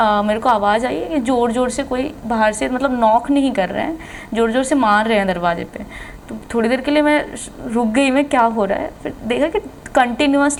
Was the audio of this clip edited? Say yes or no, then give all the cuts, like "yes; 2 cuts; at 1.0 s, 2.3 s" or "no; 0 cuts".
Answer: no; 0 cuts